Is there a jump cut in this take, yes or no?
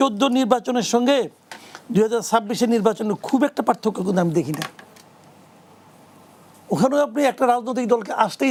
no